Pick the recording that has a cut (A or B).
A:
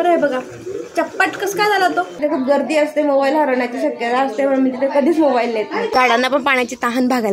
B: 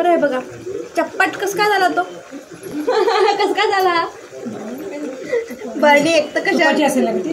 A